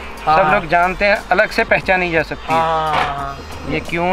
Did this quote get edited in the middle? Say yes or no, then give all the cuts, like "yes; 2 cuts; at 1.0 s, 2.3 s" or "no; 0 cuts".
no; 0 cuts